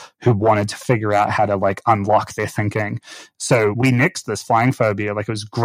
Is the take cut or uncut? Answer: cut